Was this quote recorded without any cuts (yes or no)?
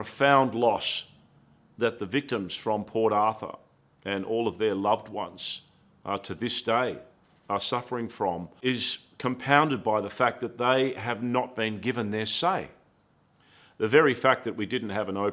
yes